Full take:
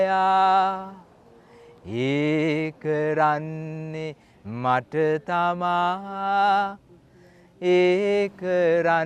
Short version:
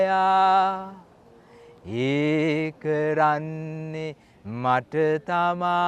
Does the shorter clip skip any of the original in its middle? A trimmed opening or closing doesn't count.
no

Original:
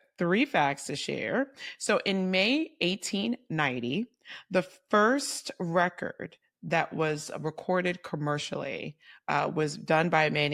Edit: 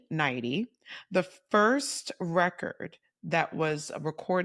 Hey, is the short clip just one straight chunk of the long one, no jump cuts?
yes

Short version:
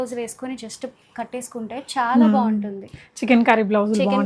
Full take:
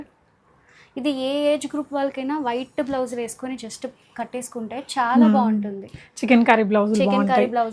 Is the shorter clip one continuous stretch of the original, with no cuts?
yes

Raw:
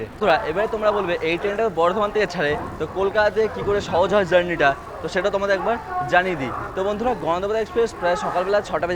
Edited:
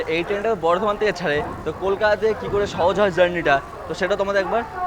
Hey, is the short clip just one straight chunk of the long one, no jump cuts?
yes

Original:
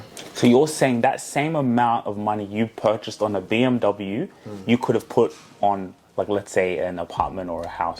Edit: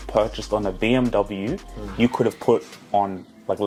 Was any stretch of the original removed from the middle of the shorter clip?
no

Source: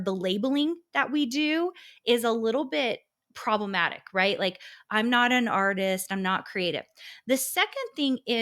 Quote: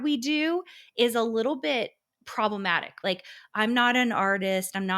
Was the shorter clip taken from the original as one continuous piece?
no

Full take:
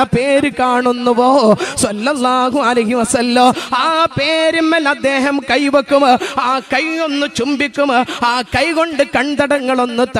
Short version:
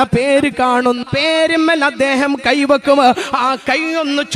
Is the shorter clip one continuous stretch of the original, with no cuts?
no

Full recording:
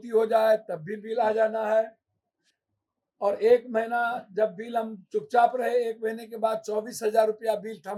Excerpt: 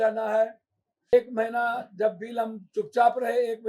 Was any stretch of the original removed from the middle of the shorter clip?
yes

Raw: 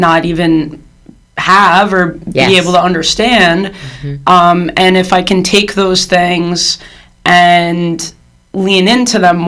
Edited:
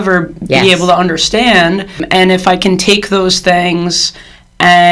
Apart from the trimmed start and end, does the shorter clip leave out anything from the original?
yes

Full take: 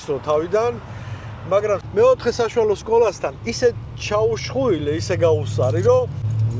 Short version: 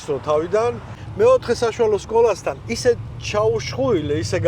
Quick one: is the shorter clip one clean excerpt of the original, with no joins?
no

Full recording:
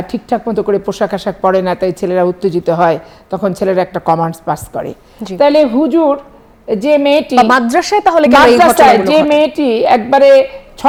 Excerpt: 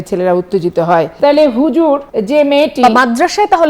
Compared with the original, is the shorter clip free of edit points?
no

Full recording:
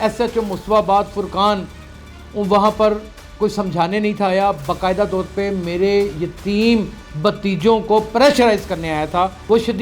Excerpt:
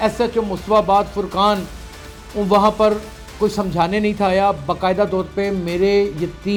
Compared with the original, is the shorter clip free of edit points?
yes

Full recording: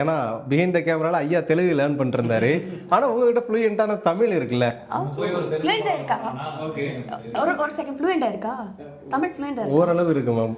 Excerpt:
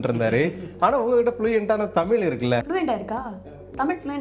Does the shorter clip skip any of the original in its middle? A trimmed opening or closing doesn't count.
yes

